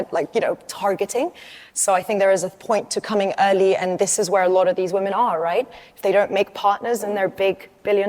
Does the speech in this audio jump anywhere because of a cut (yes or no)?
no